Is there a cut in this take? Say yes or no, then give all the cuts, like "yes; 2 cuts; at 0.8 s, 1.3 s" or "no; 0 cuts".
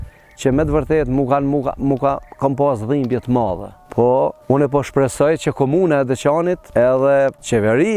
no; 0 cuts